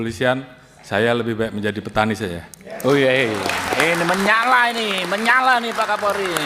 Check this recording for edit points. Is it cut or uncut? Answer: uncut